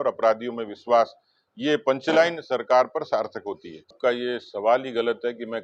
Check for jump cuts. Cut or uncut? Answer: cut